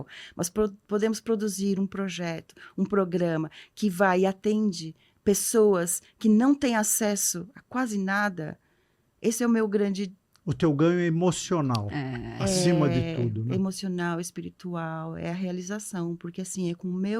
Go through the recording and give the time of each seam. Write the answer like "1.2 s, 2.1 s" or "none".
none